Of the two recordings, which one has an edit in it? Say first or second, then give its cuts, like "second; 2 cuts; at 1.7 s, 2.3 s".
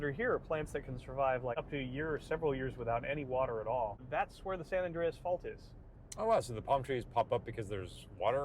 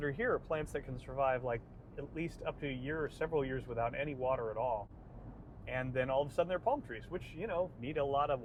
first; 2 cuts; at 1.5 s, 4.0 s